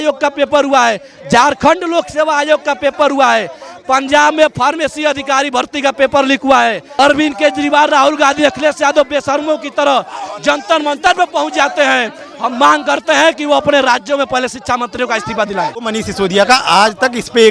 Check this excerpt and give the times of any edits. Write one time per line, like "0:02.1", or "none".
0:06.9
0:15.9